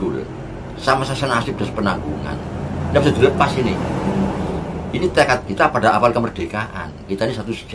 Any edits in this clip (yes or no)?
no